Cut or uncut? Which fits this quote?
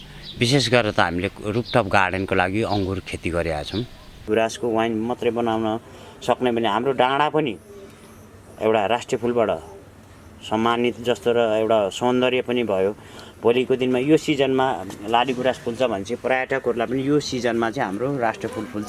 cut